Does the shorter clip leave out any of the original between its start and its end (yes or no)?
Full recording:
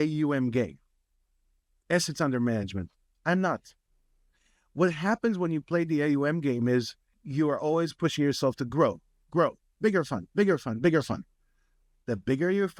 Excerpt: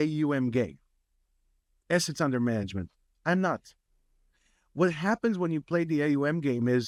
no